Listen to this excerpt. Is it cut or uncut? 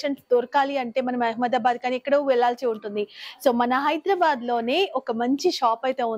uncut